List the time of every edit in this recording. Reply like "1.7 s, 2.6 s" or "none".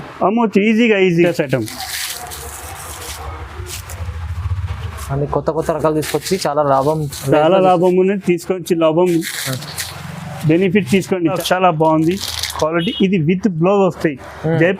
1.2 s, 11.4 s